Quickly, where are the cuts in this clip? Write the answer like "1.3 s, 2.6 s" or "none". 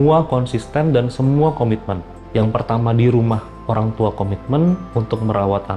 2.1 s